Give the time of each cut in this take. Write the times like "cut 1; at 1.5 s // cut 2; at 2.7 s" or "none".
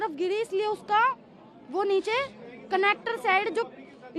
none